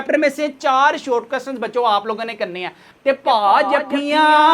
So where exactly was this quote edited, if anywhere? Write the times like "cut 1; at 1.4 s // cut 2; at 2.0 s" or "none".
cut 1; at 2.9 s